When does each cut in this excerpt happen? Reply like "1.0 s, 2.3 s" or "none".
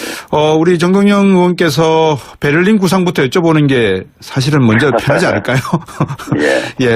5.8 s